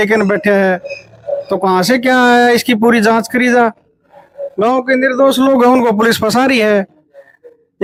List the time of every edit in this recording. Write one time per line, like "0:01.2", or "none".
none